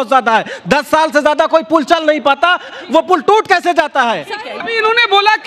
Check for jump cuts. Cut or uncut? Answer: cut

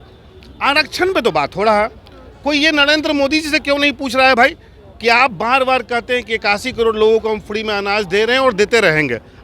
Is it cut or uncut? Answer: uncut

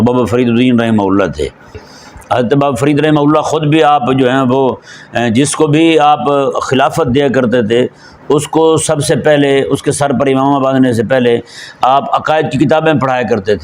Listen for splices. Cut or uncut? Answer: cut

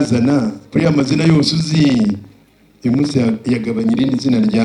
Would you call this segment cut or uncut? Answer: uncut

